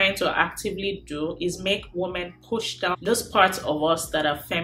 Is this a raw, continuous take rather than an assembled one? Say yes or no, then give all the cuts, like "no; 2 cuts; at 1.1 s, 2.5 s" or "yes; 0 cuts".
yes; 0 cuts